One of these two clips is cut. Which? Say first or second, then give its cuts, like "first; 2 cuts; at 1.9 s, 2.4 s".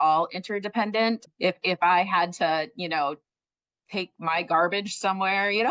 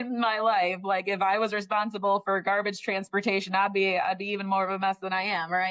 first; 1 cut; at 1.3 s